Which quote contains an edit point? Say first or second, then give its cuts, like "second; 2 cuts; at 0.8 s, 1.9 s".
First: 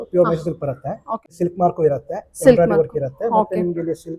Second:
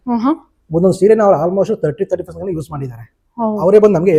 first; 1 cut; at 1.3 s